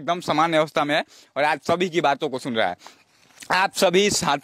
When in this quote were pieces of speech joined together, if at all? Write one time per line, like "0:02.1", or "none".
none